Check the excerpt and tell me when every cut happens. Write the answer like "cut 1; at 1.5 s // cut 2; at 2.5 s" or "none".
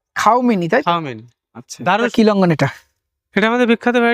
cut 1; at 2.1 s